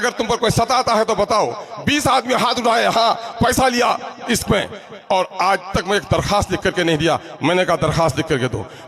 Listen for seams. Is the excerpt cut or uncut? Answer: uncut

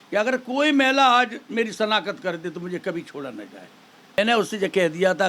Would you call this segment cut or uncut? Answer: cut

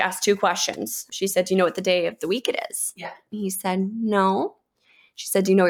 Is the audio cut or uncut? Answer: cut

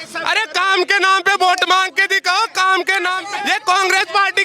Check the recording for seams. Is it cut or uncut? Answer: cut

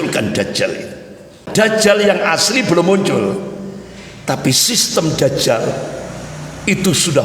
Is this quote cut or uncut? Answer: cut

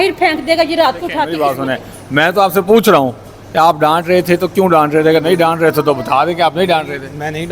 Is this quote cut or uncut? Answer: cut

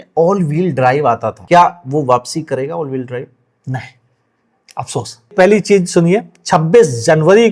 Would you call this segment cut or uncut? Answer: cut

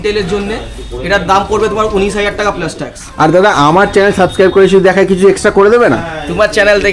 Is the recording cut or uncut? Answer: uncut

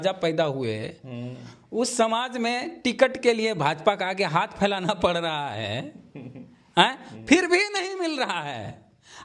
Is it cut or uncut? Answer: uncut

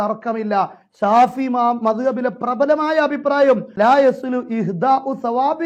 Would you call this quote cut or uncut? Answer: uncut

